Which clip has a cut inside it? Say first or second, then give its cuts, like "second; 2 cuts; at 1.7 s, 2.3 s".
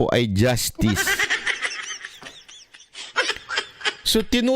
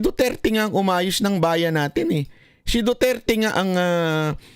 first; 1 cut; at 3.3 s